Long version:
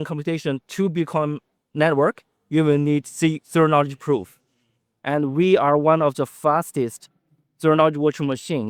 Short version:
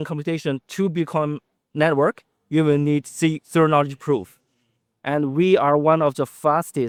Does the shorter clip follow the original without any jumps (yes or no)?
yes